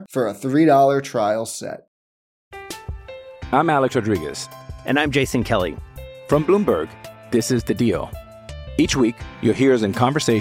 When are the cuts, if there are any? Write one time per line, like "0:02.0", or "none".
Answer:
0:01.8